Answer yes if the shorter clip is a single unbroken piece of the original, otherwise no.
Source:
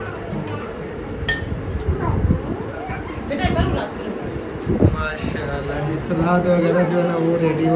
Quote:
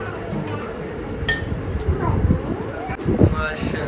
no